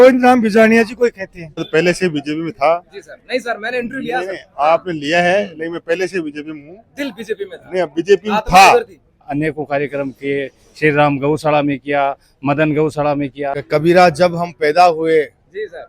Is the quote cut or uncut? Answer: cut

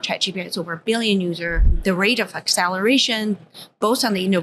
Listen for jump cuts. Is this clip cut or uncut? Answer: cut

